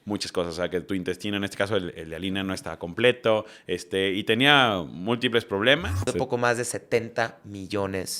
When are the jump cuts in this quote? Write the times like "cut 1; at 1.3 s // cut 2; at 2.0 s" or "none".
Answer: cut 1; at 6.1 s